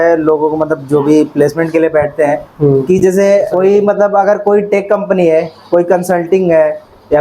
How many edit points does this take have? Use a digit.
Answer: 1